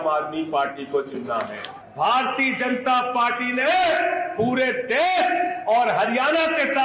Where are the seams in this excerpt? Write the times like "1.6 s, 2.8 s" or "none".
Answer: 1.8 s